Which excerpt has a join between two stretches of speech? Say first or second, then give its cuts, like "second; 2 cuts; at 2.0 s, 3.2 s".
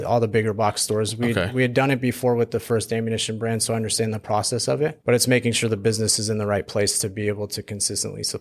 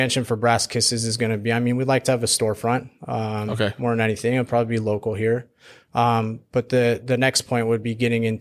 first; 1 cut; at 5.0 s